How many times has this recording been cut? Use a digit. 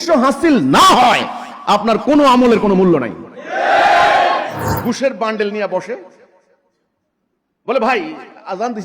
1